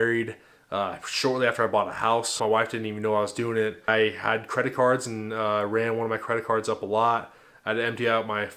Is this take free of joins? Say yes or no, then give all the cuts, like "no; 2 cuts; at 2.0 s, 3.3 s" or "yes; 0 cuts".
no; 2 cuts; at 2.4 s, 3.9 s